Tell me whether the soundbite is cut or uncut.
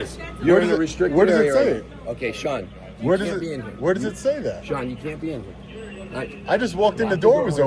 uncut